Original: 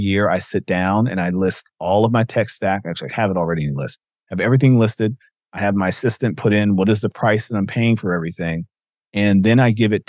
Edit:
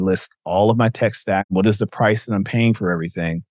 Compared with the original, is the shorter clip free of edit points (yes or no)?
no